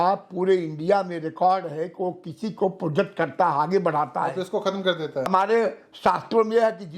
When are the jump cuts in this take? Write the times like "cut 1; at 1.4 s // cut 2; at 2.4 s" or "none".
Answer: cut 1; at 5.3 s